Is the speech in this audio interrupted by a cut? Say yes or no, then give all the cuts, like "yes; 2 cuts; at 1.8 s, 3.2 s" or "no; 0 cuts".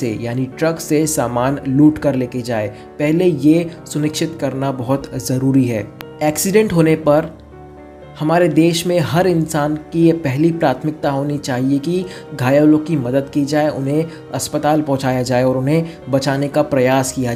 no; 0 cuts